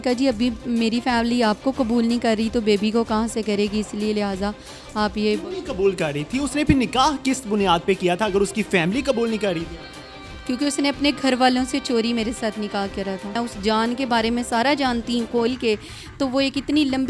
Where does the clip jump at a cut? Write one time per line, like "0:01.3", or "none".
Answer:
0:13.4